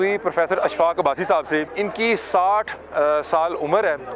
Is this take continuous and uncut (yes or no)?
no